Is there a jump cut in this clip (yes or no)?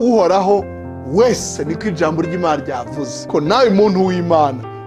yes